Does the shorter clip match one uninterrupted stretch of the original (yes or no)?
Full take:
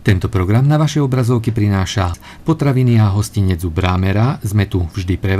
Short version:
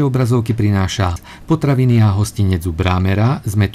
yes